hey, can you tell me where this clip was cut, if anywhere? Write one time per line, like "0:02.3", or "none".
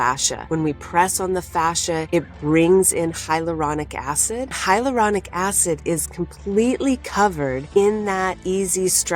0:04.6
0:07.6